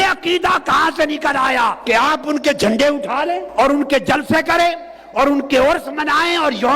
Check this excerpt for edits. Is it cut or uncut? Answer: cut